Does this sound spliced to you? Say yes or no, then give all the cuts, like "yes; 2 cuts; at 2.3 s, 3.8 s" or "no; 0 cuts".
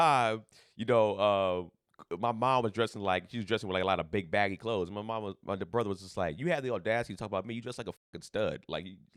no; 0 cuts